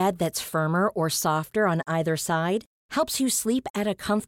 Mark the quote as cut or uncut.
uncut